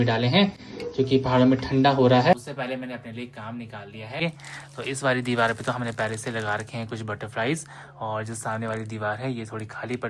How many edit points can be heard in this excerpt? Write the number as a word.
two